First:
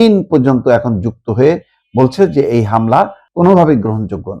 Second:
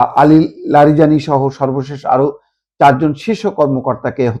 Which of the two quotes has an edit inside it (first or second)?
first